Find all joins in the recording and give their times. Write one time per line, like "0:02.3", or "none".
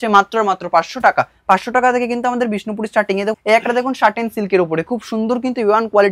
0:03.4